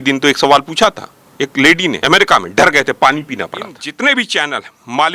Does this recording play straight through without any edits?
no; 2 cuts; at 2.0 s, 3.8 s

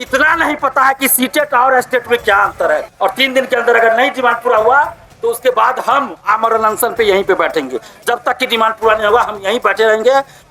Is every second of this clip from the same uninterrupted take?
no; 1 cut; at 2.9 s

